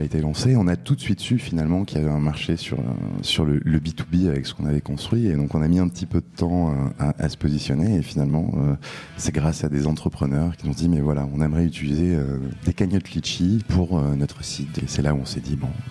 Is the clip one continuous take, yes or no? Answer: no